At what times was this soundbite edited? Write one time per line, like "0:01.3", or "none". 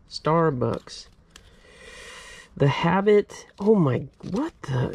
none